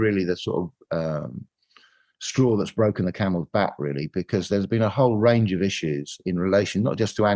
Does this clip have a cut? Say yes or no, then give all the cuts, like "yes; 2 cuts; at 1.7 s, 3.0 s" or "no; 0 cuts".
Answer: no; 0 cuts